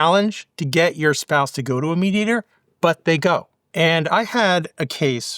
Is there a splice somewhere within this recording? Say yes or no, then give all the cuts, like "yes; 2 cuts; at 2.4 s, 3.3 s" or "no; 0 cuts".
yes; 1 cut; at 3.6 s